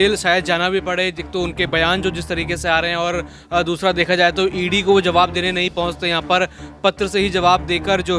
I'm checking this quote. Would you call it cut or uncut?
uncut